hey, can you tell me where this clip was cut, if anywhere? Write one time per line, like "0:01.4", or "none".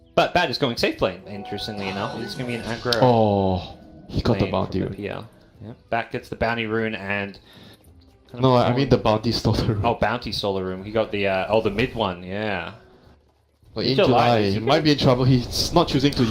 0:04.4